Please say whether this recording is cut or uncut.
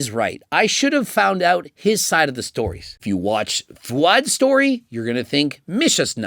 cut